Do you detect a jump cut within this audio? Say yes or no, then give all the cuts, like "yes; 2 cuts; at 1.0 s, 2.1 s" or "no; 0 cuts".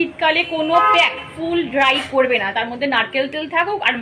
no; 0 cuts